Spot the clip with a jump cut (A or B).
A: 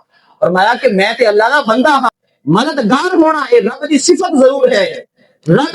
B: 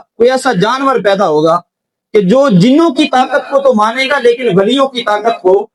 A